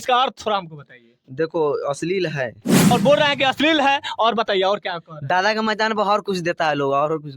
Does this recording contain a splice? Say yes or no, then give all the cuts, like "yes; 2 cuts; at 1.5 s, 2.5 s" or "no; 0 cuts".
yes; 1 cut; at 2.9 s